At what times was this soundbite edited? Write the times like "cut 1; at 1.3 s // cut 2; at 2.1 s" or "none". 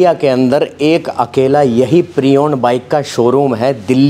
none